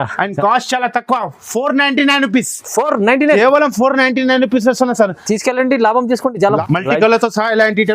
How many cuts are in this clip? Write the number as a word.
one